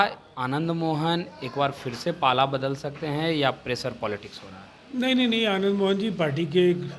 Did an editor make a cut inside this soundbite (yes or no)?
no